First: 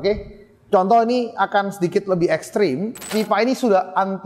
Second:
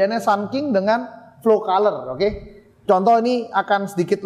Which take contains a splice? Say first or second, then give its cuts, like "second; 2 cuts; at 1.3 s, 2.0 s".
first; 1 cut; at 3.1 s